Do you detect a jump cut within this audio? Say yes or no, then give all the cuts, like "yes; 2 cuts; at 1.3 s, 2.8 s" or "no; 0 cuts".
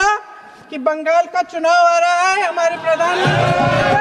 no; 0 cuts